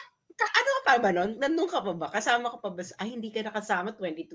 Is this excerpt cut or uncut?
uncut